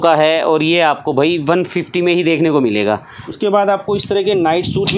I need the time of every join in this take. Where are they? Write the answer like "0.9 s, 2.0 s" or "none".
3.3 s